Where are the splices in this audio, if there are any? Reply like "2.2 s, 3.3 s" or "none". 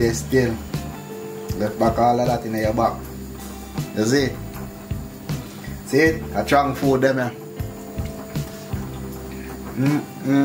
7.9 s, 9.7 s